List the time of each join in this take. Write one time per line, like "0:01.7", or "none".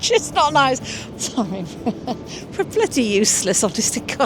0:01.0